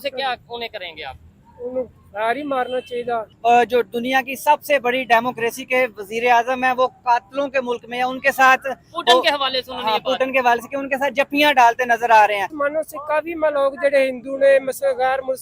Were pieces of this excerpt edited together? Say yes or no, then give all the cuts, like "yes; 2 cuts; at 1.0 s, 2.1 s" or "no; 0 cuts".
yes; 2 cuts; at 3.3 s, 12.5 s